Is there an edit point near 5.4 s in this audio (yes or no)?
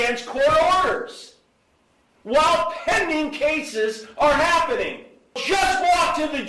yes